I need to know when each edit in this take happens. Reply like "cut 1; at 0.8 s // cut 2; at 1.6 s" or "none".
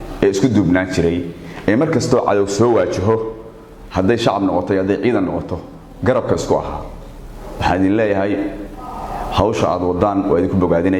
none